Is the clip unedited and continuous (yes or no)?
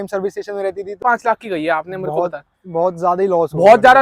no